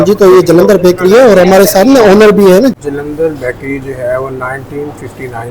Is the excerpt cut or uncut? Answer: cut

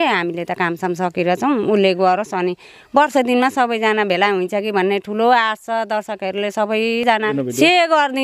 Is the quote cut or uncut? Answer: cut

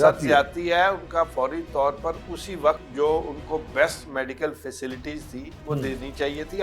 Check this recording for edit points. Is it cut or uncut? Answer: cut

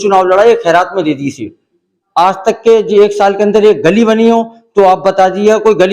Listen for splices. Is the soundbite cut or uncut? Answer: cut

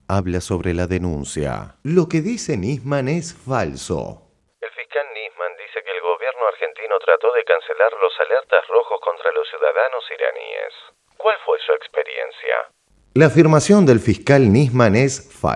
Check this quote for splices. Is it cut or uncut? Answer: uncut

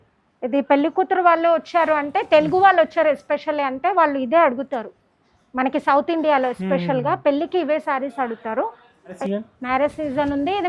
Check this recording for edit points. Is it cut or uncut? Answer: cut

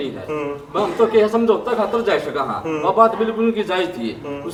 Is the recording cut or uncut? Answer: uncut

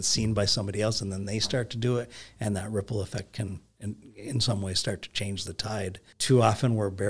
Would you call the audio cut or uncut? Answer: cut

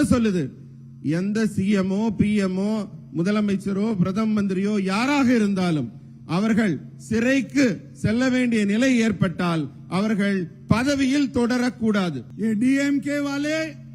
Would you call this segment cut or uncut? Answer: cut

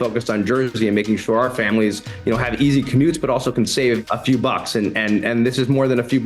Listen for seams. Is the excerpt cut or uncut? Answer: cut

